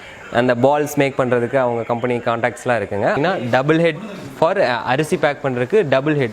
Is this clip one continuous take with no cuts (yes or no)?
no